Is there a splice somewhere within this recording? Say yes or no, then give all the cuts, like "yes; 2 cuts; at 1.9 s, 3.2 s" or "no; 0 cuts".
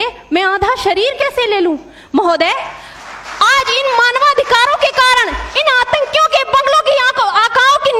no; 0 cuts